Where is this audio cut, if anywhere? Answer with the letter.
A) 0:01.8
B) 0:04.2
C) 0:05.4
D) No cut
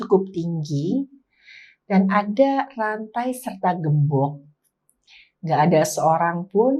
D